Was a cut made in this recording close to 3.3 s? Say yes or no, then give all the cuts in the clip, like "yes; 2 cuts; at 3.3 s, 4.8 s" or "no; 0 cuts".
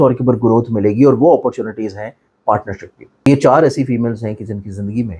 yes; 1 cut; at 3.3 s